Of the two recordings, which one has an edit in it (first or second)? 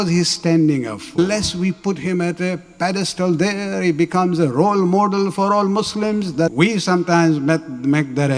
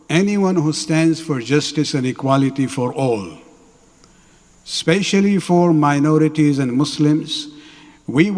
first